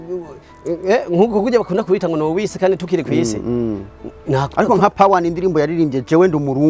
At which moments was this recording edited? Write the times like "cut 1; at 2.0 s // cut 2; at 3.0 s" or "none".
none